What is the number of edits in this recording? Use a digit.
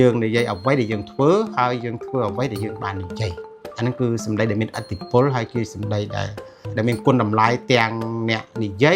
1